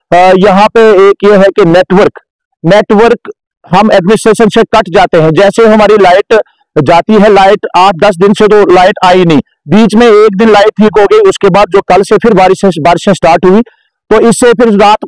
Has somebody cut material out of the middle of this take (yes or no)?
no